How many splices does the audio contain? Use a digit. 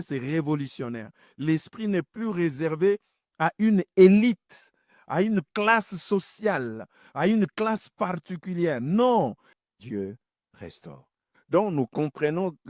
1